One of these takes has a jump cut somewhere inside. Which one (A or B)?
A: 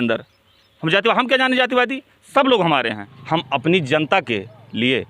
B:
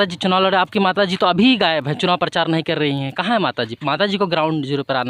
A